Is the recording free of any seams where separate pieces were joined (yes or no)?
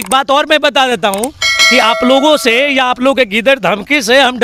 yes